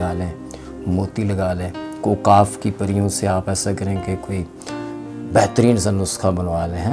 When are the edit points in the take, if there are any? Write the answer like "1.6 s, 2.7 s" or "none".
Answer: none